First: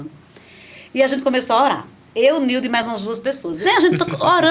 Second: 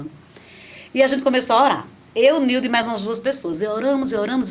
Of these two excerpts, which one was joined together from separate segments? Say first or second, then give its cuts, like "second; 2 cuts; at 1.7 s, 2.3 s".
first; 1 cut; at 3.5 s